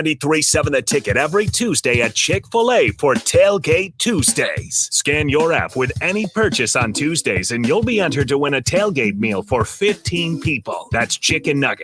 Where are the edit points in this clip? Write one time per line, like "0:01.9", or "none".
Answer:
none